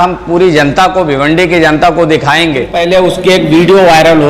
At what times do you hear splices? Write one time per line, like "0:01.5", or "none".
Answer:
0:02.7